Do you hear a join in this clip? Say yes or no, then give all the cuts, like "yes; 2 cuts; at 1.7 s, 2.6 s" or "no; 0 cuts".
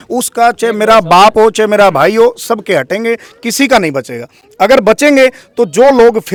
no; 0 cuts